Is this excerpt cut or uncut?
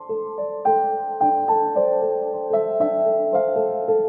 uncut